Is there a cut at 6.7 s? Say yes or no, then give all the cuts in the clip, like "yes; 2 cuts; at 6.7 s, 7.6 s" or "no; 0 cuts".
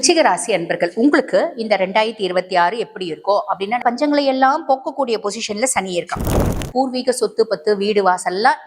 yes; 2 cuts; at 3.8 s, 6.7 s